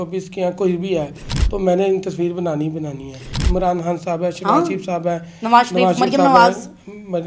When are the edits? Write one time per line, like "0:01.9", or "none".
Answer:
0:03.3